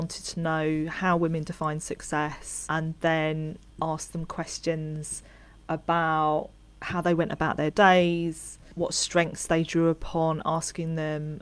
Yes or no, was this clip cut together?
yes